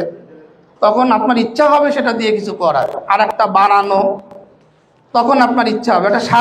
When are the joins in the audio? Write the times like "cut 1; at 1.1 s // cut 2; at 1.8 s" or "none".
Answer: none